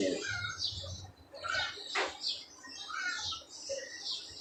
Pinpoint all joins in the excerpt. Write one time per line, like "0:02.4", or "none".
none